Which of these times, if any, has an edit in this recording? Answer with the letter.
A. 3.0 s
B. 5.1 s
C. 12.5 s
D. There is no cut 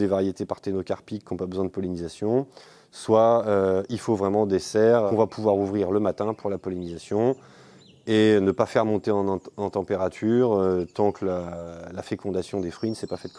B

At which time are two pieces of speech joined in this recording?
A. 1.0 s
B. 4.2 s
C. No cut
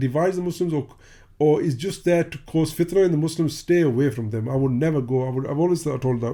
C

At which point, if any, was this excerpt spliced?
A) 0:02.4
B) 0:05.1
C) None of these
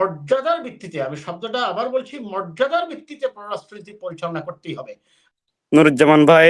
B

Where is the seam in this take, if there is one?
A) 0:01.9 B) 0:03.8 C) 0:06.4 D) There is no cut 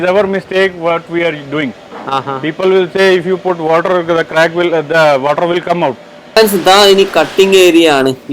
C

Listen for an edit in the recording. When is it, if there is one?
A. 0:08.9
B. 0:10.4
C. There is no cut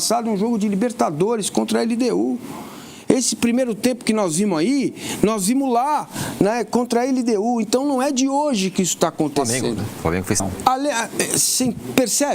B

